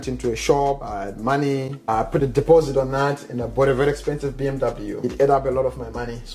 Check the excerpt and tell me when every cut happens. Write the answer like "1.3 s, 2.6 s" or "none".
0.9 s, 1.9 s, 5.1 s

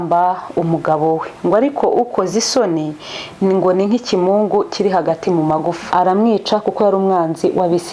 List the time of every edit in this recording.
5.8 s

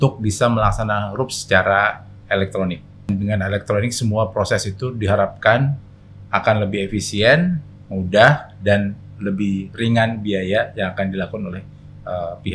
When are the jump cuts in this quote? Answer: 3.1 s

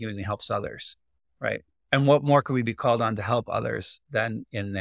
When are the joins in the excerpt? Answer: 1.8 s

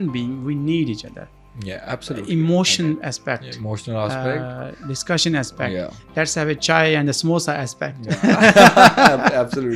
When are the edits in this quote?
none

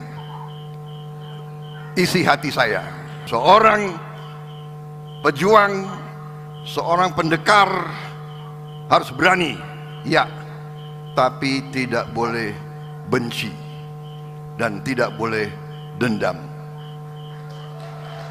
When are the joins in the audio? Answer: 3.1 s

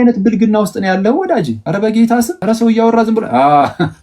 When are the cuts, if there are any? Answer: 1.6 s, 2.3 s

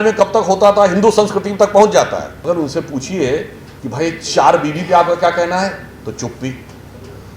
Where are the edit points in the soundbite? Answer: 2.3 s

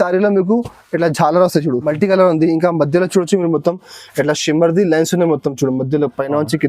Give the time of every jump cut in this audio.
1.8 s

